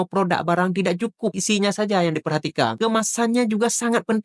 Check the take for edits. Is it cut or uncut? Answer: cut